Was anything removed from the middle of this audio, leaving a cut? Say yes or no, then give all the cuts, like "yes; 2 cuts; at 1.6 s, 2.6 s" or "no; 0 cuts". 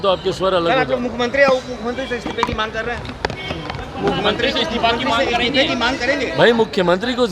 no; 0 cuts